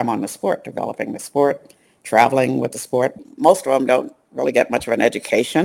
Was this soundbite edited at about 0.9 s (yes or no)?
no